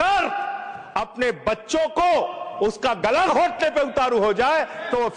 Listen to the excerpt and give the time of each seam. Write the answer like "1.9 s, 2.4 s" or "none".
none

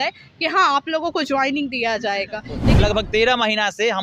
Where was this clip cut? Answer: 2.6 s

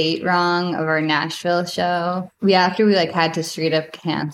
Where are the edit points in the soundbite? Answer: 2.2 s

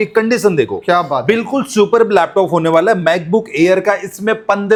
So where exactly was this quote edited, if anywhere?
none

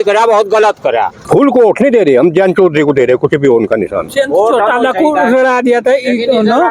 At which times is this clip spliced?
1.2 s, 4.1 s

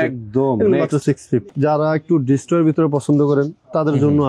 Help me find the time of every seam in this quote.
1.5 s

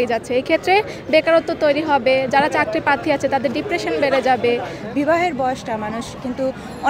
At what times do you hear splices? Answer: 4.8 s

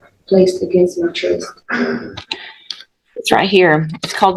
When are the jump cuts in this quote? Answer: none

